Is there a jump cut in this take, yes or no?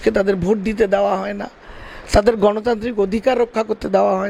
no